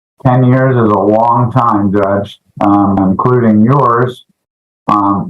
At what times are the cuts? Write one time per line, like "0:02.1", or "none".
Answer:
0:03.0